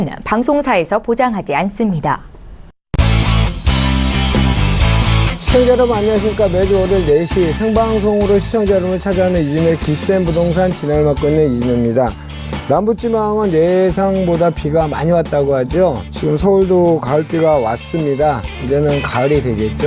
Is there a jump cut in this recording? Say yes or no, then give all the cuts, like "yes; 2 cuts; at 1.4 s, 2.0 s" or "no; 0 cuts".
yes; 1 cut; at 2.3 s